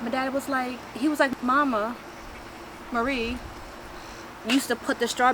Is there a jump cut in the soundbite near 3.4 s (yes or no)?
no